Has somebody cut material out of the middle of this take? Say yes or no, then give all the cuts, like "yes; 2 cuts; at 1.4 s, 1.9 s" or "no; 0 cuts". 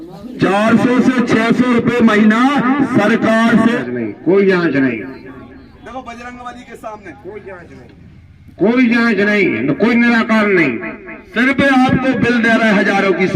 yes; 1 cut; at 3.8 s